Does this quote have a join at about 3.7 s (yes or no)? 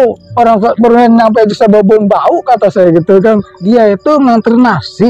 yes